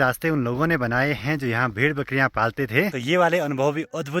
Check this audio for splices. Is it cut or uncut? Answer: cut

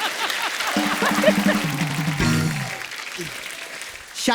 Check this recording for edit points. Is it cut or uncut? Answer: cut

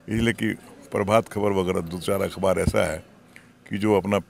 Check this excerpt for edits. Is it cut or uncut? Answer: uncut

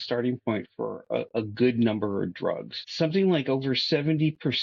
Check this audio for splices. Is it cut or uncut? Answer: cut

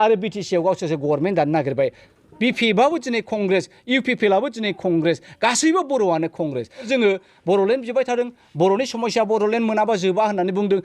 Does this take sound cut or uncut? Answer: cut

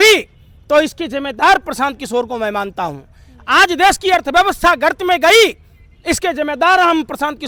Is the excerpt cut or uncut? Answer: uncut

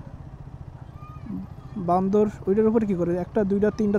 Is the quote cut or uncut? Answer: uncut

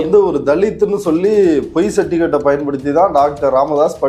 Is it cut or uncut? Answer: uncut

